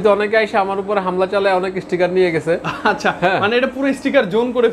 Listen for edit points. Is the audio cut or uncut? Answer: uncut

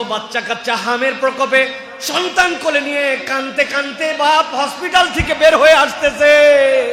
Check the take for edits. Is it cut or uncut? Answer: uncut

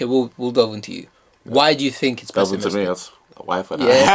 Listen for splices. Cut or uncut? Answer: uncut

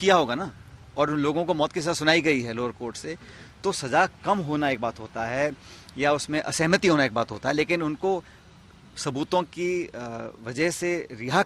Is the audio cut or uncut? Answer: uncut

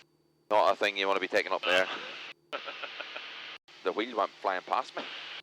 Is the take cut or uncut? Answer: cut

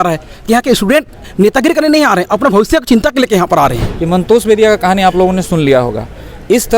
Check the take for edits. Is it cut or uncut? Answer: cut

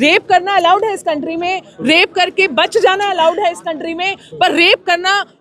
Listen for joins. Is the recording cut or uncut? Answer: uncut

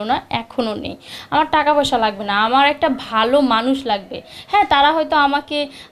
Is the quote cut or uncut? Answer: uncut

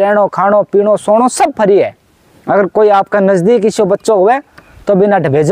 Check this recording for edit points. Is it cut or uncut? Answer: uncut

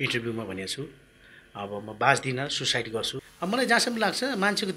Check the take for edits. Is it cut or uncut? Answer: cut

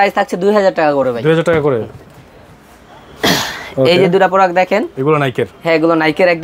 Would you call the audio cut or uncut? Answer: uncut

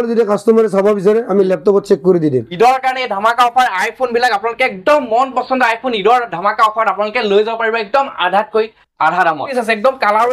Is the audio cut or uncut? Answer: cut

